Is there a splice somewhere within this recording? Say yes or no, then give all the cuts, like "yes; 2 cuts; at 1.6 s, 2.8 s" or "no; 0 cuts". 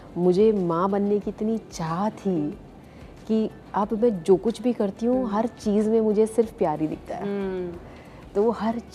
no; 0 cuts